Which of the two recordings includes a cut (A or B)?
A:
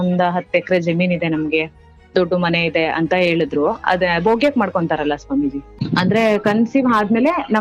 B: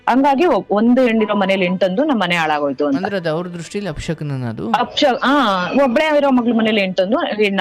A